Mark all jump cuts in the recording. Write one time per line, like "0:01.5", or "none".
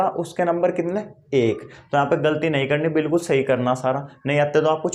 none